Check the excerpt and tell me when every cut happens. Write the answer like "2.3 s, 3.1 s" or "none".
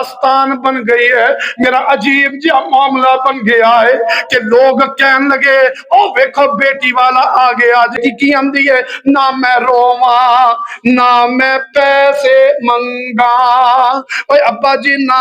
8.0 s